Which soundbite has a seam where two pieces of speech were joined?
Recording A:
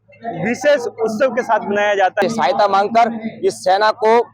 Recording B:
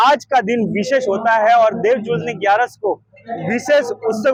A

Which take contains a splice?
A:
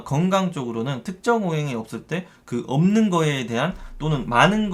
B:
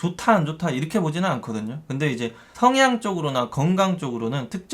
B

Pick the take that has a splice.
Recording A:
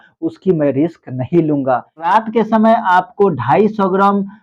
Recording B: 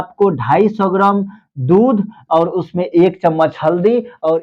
A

